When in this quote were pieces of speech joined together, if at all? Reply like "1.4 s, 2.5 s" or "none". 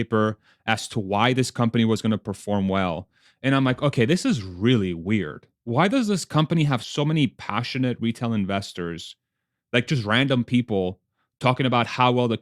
6.9 s, 9.9 s